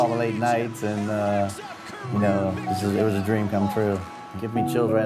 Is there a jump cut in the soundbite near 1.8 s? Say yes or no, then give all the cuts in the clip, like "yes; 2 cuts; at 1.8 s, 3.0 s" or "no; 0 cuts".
no; 0 cuts